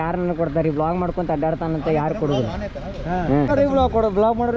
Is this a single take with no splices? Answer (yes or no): no